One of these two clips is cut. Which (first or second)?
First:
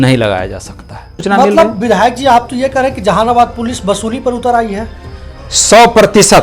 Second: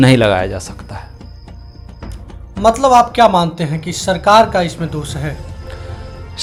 first